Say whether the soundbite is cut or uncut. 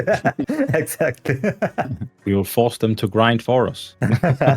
cut